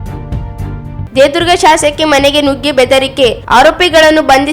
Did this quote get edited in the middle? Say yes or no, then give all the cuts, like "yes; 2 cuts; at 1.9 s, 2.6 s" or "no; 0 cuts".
yes; 1 cut; at 1.0 s